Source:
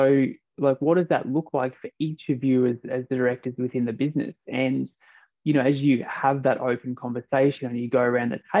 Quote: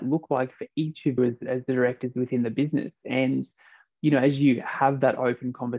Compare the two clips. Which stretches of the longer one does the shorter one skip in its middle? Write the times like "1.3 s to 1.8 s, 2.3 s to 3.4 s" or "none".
2.4 s to 2.6 s